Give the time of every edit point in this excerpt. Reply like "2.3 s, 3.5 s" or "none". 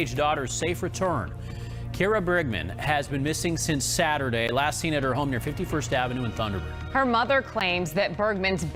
none